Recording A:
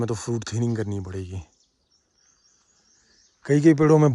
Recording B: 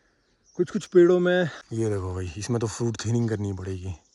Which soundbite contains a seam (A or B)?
B